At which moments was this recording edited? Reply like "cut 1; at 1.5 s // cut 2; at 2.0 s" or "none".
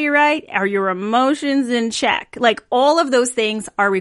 none